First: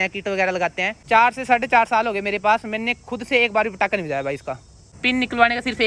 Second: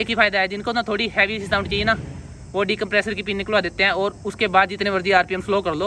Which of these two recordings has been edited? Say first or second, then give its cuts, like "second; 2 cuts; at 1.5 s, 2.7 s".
first; 2 cuts; at 1.0 s, 4.9 s